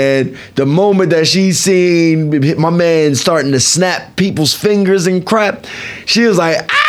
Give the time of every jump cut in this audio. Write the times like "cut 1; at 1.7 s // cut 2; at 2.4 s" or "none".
none